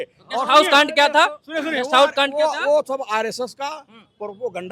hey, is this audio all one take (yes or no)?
yes